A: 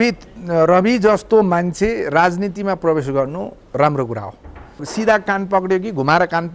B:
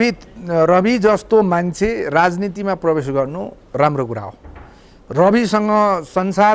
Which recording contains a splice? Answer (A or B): A